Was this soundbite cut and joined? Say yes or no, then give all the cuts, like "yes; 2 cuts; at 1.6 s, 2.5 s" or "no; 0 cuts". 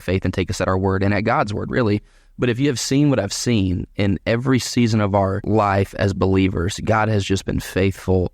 yes; 1 cut; at 5.4 s